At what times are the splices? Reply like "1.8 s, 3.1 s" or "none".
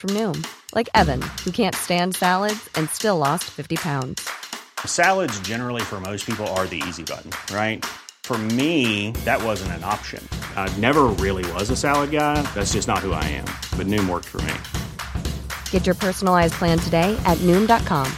none

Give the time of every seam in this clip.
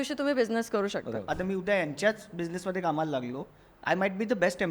1.3 s

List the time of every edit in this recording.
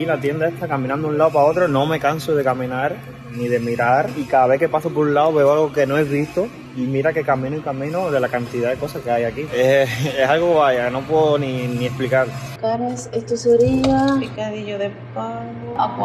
none

